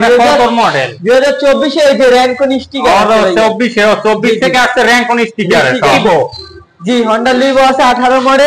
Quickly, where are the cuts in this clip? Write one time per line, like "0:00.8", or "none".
0:06.0